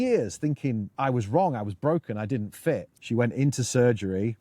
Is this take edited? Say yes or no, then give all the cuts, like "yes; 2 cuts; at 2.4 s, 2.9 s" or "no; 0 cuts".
yes; 2 cuts; at 0.9 s, 2.9 s